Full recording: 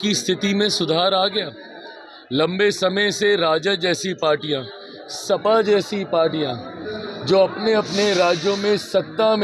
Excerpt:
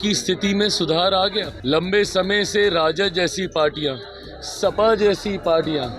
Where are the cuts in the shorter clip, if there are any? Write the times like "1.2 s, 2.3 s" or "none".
1.5 s